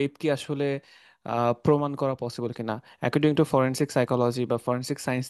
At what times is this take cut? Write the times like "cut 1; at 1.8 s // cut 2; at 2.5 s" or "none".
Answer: none